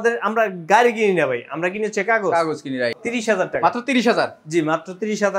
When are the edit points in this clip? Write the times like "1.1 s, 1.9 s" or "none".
2.9 s